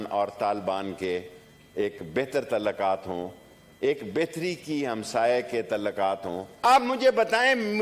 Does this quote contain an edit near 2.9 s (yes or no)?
no